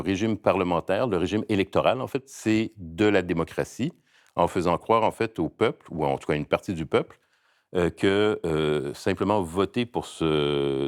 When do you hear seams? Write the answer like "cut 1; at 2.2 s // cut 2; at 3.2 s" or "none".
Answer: cut 1; at 2.2 s